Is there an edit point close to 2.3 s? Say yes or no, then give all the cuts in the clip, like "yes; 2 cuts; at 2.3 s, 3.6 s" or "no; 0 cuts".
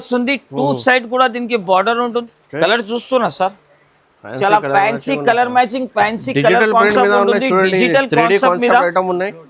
yes; 1 cut; at 2.3 s